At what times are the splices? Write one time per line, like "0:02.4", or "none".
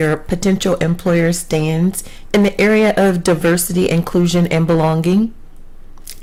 none